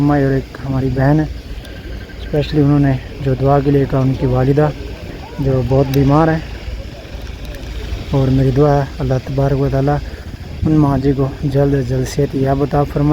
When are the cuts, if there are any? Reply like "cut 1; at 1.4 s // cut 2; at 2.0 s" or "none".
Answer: none